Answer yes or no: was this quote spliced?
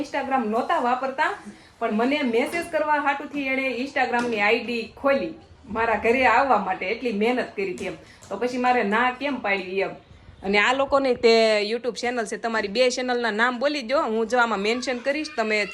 no